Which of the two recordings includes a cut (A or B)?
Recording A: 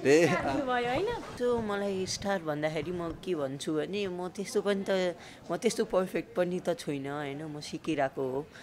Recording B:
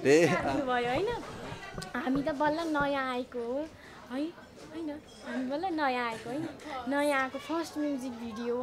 A